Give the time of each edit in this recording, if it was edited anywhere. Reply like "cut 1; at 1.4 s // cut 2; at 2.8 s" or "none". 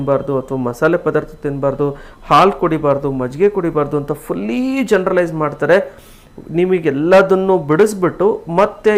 none